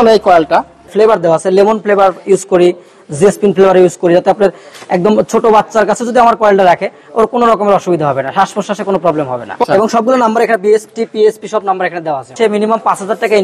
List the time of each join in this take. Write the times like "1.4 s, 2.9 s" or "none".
0.9 s, 9.6 s, 12.3 s